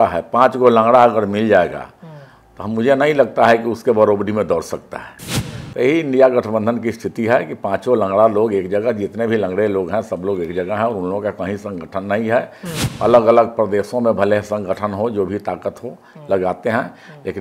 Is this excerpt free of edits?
yes; 0 cuts

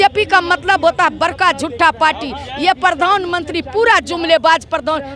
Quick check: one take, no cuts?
yes; 0 cuts

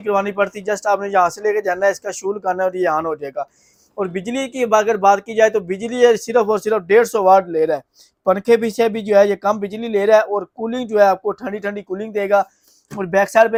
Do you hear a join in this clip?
no; 0 cuts

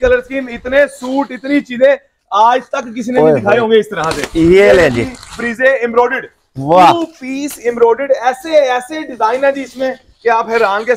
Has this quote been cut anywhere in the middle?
no; 0 cuts

